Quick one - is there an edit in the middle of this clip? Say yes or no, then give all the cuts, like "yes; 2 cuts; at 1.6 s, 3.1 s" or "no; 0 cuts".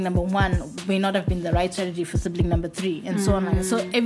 no; 0 cuts